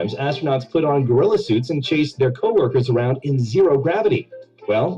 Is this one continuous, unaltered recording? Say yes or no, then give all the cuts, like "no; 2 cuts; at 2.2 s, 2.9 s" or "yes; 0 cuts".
no; 2 cuts; at 0.9 s, 3.7 s